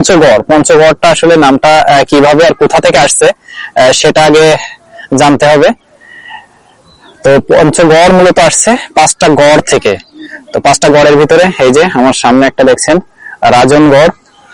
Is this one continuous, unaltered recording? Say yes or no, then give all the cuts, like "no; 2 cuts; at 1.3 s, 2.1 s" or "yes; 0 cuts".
yes; 0 cuts